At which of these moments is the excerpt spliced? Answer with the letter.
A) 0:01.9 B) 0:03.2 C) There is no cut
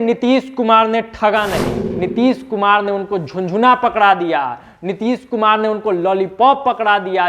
A